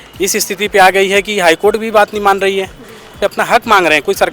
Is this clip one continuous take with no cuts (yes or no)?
no